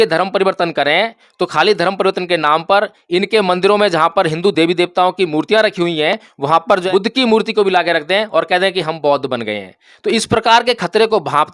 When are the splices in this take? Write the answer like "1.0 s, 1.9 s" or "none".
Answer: 6.9 s